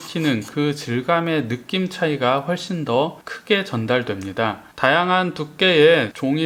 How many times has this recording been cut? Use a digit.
0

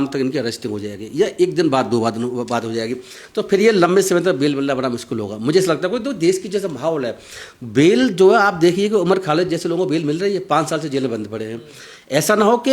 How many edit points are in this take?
0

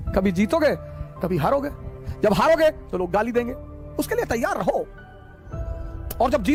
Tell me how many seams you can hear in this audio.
0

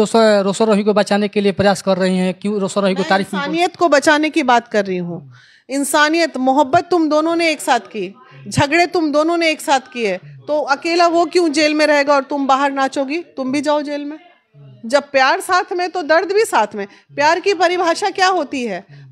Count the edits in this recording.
0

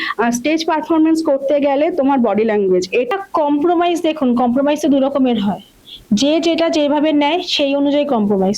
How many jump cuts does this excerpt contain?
1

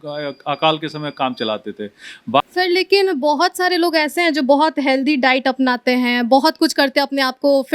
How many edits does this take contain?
1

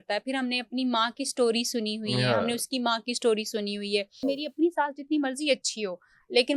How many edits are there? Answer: 1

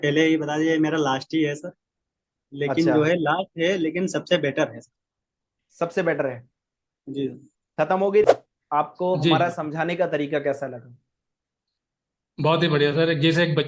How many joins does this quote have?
1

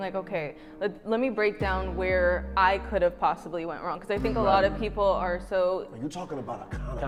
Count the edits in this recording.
0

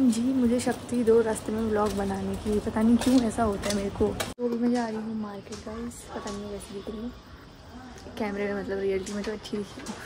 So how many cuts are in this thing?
1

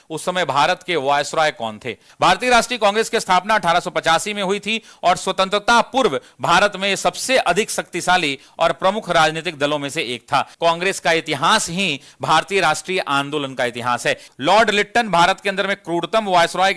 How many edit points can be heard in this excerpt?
3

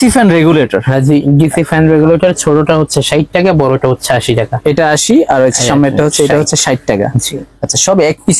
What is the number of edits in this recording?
0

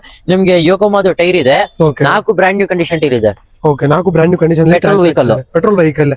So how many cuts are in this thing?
0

